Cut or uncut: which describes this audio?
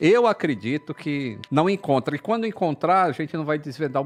uncut